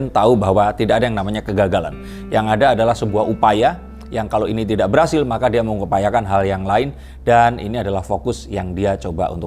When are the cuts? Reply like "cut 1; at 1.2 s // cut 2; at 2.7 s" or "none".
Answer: none